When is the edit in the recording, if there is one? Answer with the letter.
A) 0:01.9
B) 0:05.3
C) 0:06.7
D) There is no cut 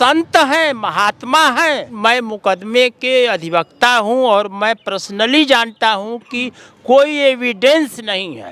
A